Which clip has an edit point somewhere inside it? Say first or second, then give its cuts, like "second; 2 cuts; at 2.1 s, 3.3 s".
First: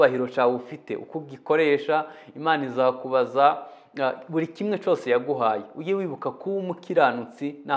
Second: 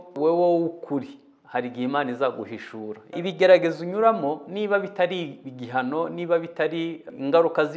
second; 1 cut; at 3.2 s